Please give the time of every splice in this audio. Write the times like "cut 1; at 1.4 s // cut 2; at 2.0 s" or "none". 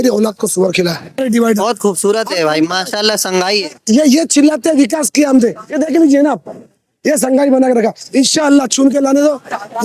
cut 1; at 1.2 s